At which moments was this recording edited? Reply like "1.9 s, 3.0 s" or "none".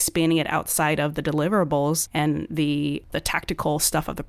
2.1 s, 3.1 s